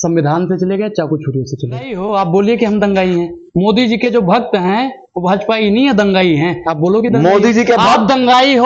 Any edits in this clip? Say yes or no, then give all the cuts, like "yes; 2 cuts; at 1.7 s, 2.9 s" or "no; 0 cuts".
yes; 1 cut; at 2.0 s